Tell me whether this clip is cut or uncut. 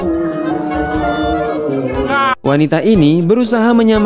cut